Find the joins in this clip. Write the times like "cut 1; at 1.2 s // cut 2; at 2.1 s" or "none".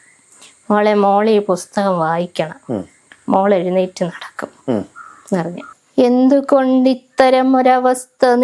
cut 1; at 5.6 s

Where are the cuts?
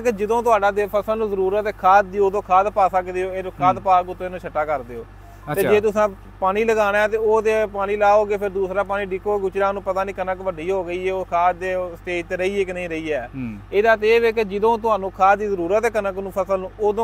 none

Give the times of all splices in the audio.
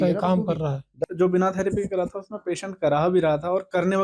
cut 1; at 1.0 s

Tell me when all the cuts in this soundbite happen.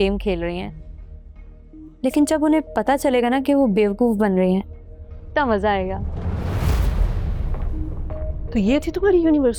none

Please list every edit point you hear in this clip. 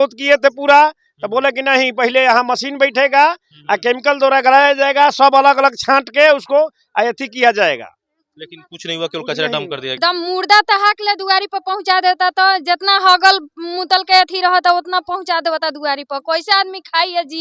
cut 1; at 10.0 s

